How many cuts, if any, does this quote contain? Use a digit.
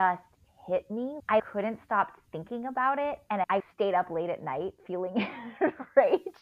3